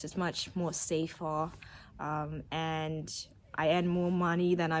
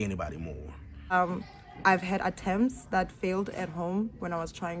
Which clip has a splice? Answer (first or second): second